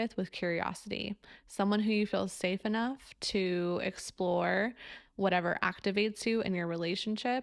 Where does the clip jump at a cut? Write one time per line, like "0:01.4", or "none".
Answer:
none